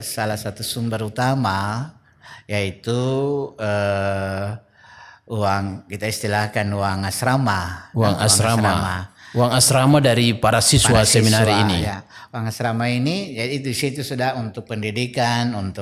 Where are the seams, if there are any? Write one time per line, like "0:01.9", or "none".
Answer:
none